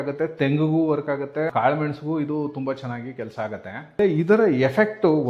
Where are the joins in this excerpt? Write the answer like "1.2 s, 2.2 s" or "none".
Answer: 1.5 s, 4.0 s